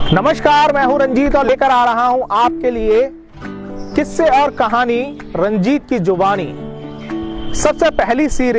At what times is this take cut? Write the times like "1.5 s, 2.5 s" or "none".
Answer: 1.5 s

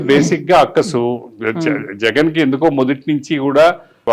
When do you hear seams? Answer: none

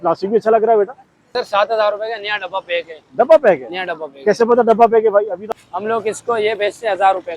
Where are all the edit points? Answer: 1.3 s, 5.5 s

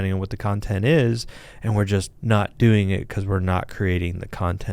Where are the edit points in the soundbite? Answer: 2.1 s

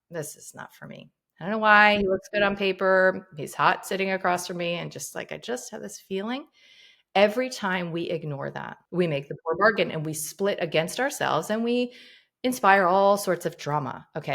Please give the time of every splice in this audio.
8.7 s

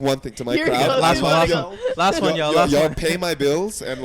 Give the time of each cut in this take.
none

